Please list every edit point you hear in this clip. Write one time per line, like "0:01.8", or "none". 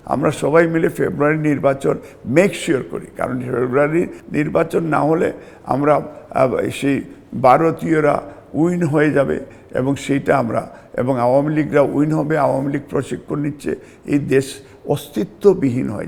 none